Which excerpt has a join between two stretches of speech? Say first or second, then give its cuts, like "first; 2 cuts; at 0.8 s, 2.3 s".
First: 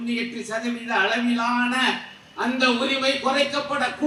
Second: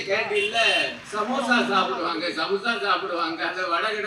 second; 1 cut; at 1.0 s